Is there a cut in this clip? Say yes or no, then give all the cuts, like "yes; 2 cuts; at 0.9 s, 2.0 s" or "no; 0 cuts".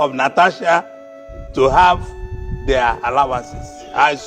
no; 0 cuts